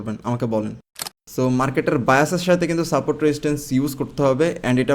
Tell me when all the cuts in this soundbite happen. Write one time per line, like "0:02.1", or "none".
0:01.0